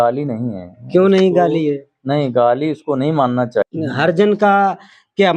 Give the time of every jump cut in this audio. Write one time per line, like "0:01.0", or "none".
0:03.7